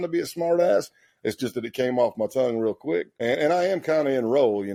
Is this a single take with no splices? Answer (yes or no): yes